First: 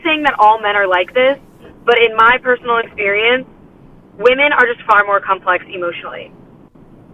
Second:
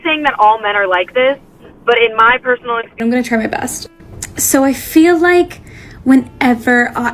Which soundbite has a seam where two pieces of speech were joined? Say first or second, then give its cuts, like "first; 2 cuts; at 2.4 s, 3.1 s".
second; 1 cut; at 3.0 s